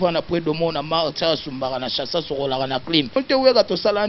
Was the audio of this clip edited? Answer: yes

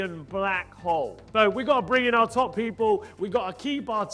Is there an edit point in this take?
yes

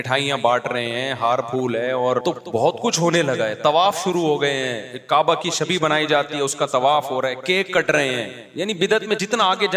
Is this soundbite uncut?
no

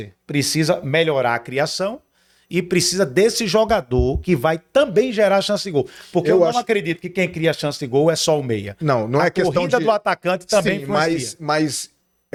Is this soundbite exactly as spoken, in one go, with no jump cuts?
yes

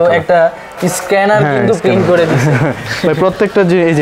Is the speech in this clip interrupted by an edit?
no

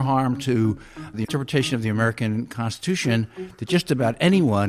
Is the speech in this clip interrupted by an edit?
yes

